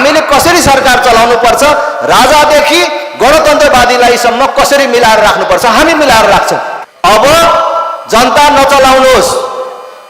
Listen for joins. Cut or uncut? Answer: cut